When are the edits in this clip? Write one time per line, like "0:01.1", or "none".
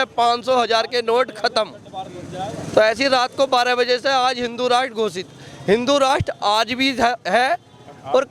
none